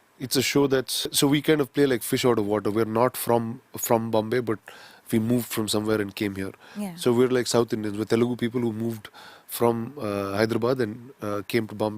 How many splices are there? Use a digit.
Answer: 1